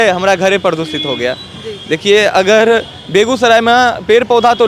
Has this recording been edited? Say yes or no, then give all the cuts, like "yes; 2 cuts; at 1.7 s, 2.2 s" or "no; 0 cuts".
no; 0 cuts